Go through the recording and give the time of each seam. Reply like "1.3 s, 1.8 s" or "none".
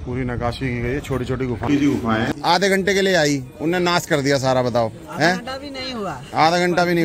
2.3 s